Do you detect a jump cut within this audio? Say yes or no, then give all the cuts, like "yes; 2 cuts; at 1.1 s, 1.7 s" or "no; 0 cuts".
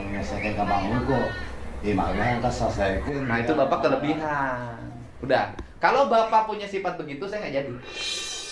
no; 0 cuts